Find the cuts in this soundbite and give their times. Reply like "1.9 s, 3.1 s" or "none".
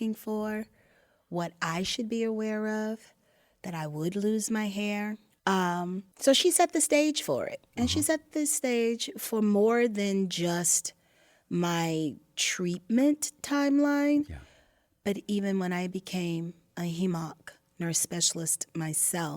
5.3 s